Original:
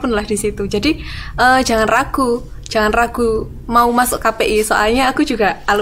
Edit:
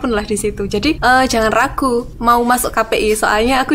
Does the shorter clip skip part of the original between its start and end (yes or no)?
yes